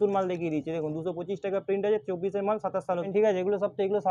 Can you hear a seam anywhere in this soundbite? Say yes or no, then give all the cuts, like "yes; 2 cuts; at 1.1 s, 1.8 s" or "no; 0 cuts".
yes; 1 cut; at 3.1 s